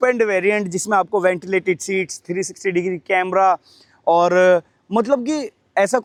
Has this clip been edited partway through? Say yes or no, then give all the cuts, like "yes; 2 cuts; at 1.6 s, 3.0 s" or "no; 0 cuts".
no; 0 cuts